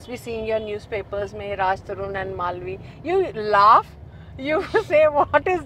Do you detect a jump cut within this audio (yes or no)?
no